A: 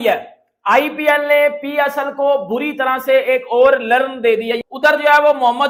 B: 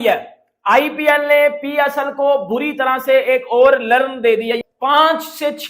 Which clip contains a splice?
B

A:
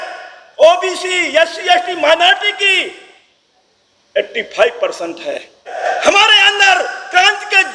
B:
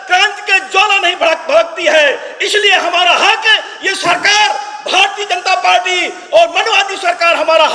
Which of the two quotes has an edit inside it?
A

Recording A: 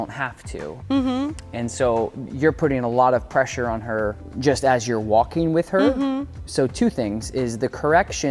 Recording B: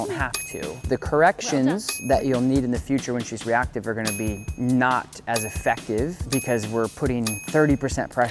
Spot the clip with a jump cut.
B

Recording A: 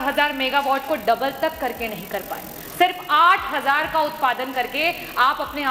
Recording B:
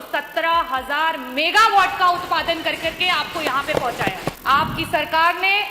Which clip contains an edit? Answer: B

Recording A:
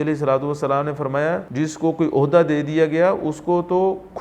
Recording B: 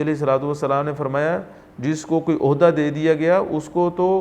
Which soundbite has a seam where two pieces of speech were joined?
A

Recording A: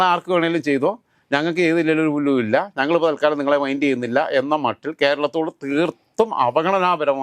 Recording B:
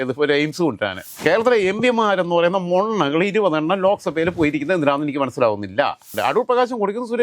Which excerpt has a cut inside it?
B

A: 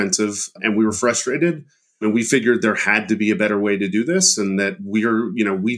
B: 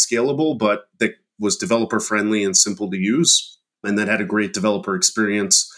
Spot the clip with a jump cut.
A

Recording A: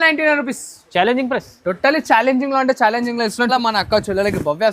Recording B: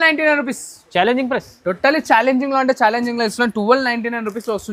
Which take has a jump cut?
A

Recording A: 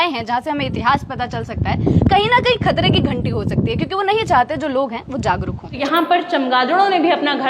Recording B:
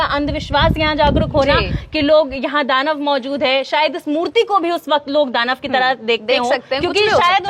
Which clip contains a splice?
A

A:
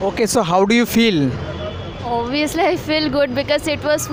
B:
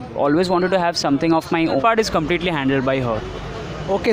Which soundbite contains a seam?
B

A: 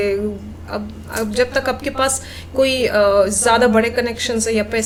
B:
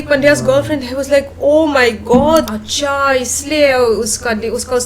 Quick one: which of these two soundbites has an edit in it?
B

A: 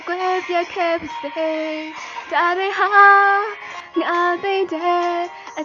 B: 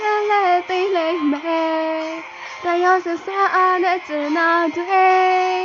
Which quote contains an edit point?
A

